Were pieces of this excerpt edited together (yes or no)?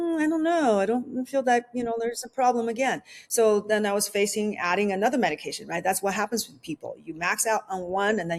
no